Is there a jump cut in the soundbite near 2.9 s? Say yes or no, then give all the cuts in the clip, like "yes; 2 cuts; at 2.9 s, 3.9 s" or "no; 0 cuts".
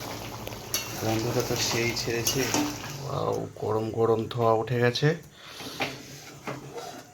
yes; 1 cut; at 2.9 s